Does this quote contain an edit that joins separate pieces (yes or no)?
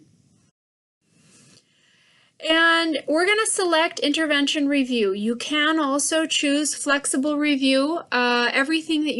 yes